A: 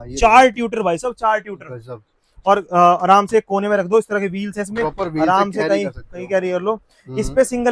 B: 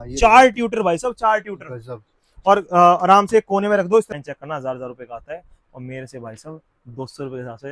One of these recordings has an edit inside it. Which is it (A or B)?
B